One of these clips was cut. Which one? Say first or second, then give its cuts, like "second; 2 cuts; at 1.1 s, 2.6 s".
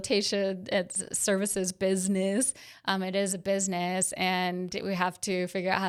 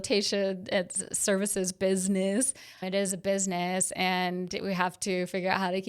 second; 1 cut; at 2.8 s